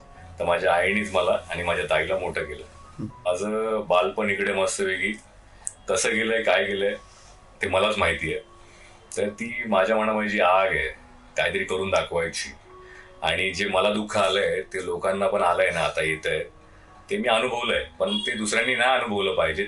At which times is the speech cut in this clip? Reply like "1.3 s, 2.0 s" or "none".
3.3 s